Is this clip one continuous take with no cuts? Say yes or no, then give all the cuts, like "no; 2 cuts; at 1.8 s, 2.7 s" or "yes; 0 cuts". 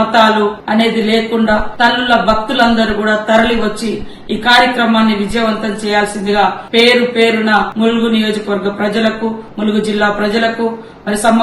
no; 1 cut; at 1.6 s